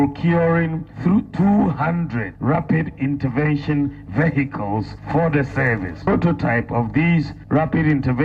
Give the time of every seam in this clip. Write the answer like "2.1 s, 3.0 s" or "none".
2.3 s, 5.0 s, 7.4 s